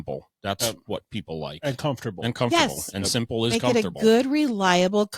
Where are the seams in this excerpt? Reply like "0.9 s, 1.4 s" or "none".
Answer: none